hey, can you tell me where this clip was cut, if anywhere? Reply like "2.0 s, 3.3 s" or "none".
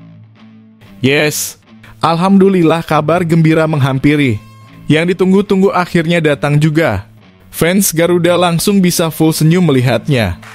1.0 s